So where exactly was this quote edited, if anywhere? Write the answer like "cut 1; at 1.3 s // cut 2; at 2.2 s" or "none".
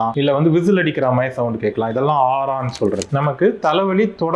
cut 1; at 3.1 s